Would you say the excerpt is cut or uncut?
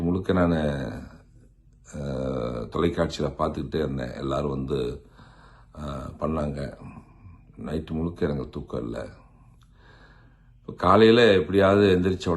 uncut